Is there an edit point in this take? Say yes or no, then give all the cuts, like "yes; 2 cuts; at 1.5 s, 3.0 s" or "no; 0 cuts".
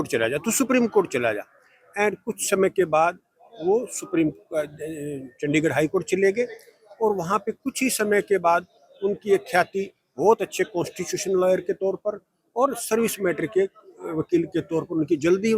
no; 0 cuts